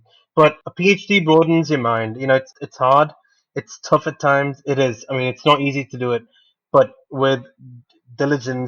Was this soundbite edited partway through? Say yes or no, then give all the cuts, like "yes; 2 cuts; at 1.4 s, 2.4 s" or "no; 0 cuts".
yes; 1 cut; at 2.6 s